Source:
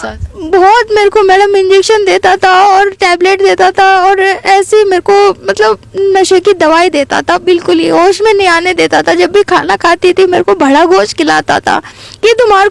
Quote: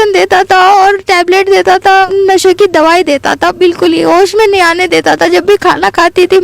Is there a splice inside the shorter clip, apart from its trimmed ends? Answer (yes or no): yes